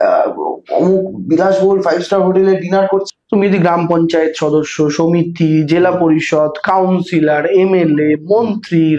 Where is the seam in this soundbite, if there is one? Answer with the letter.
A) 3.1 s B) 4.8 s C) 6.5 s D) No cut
A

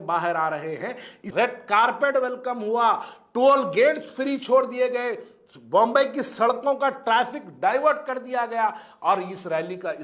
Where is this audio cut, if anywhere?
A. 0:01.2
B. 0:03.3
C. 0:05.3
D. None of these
A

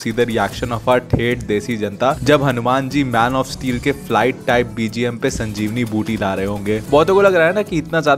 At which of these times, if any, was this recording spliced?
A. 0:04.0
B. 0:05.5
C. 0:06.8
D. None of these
C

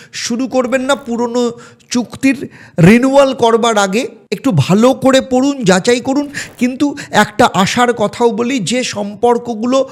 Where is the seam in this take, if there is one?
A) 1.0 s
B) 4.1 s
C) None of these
C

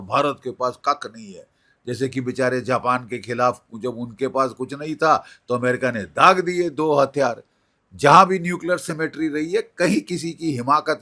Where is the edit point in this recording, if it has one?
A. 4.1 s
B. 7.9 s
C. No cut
C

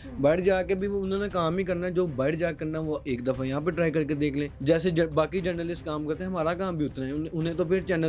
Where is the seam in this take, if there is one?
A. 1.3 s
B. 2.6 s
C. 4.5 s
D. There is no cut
C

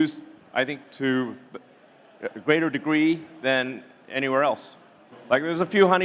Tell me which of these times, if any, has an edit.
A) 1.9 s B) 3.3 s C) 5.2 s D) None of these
C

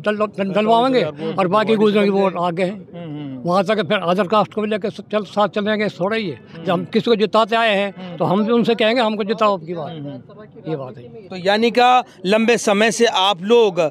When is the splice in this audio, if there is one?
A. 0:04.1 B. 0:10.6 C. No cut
C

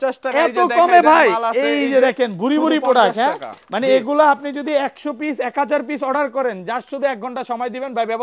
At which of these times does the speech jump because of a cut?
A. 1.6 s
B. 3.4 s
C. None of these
C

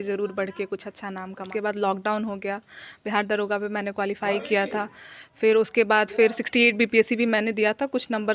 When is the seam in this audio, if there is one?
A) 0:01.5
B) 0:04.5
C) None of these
A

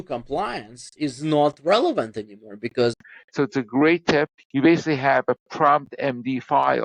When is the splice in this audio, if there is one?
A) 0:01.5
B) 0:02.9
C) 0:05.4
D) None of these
B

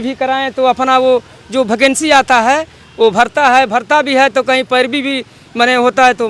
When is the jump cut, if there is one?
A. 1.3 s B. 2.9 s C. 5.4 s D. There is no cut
D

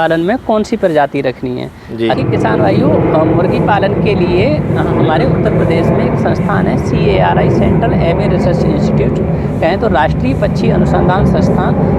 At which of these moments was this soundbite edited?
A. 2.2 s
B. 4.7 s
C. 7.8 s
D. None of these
A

